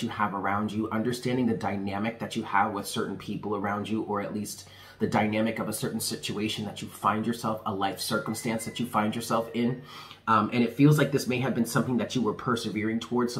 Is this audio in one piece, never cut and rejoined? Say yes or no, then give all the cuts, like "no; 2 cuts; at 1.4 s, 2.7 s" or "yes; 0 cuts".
yes; 0 cuts